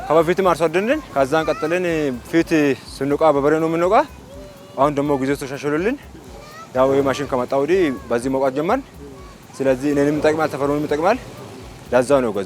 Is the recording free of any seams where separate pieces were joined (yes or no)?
no